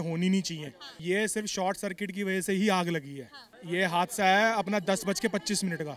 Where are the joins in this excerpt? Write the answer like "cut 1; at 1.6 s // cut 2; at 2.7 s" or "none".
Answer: cut 1; at 1.0 s

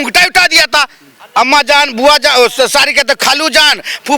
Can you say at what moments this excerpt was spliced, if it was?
cut 1; at 1.1 s

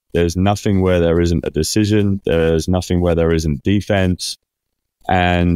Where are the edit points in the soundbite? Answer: none

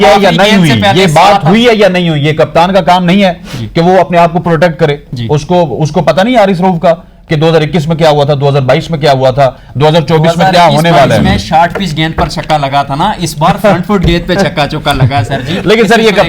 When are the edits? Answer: none

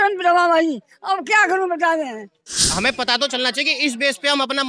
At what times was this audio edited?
cut 1; at 2.7 s

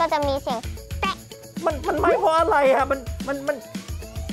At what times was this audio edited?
cut 1; at 1.5 s

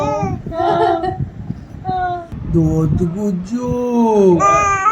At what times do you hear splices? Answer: cut 1; at 2.4 s

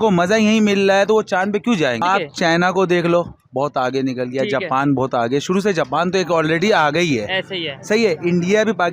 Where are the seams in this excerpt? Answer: cut 1; at 2.0 s

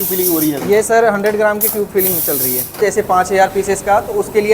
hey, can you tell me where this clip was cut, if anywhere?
cut 1; at 2.8 s

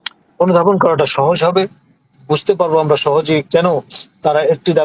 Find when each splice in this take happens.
none

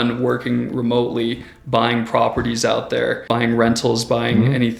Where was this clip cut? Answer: cut 1; at 3.3 s

